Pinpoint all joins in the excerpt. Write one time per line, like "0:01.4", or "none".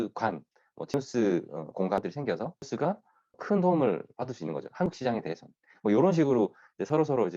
0:02.0